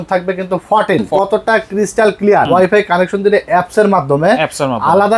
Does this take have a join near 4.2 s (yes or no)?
no